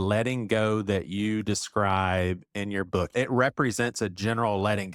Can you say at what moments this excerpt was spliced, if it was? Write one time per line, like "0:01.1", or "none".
0:03.1